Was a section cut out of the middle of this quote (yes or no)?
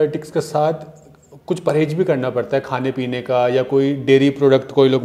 no